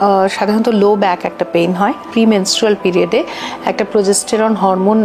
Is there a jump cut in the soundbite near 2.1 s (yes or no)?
yes